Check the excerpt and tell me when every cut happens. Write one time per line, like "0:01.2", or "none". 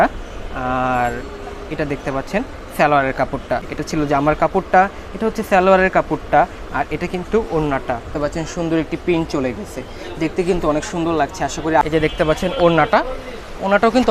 0:03.7
0:08.1
0:11.8